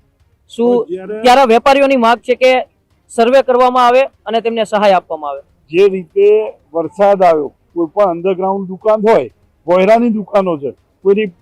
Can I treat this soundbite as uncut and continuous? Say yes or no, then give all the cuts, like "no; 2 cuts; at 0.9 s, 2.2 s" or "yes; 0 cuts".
yes; 0 cuts